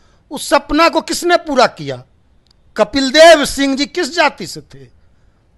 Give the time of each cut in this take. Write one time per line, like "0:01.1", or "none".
none